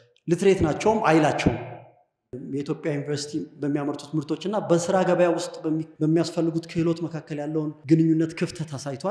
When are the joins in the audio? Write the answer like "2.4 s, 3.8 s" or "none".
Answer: 2.4 s, 5.9 s, 7.8 s

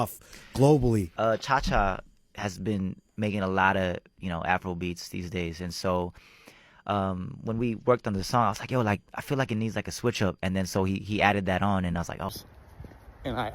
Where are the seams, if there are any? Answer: 12.3 s

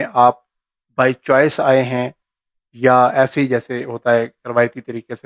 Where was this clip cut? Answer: none

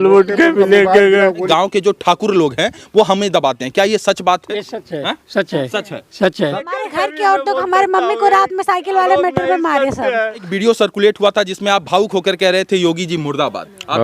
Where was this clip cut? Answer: 1.4 s, 6.6 s, 10.5 s

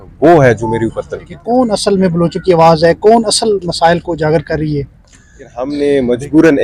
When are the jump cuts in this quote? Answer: 1.3 s, 5.6 s

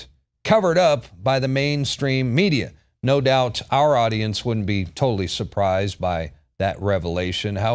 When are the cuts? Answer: 2.9 s

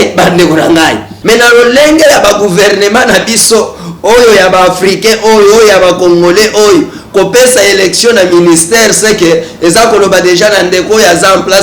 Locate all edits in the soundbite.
1.1 s

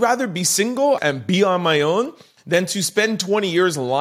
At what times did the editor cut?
1.0 s

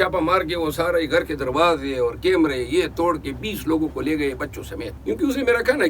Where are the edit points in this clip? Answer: 4.9 s

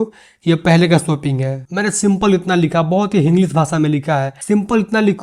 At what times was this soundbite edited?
1.6 s, 4.3 s

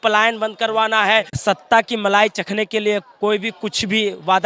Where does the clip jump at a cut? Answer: 1.3 s

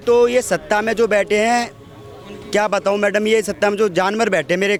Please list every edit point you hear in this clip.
none

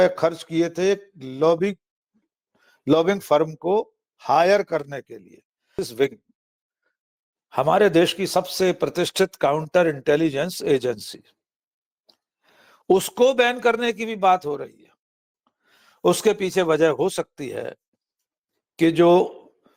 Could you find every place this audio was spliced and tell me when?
5.8 s

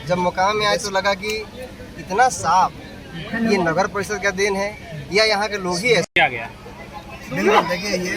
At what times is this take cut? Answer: 6.2 s

